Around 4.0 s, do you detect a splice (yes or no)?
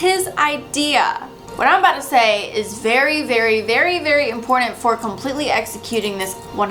no